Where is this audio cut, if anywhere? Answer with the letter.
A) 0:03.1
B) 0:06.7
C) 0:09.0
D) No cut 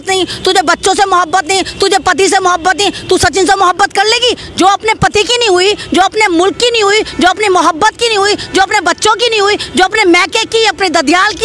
D